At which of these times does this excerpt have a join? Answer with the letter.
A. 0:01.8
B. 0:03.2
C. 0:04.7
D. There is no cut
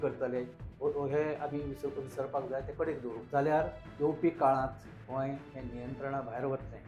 B